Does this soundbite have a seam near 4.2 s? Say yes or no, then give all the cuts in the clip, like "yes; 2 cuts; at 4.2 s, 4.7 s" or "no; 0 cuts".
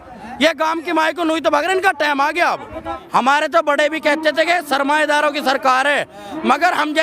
no; 1 cut; at 2.9 s